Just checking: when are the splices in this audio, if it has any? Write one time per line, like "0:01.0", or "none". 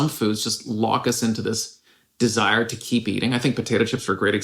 none